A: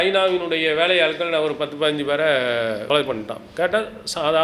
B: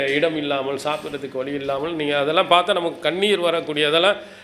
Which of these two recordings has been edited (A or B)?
A